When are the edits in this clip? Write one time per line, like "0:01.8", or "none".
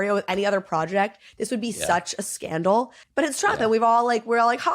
0:03.0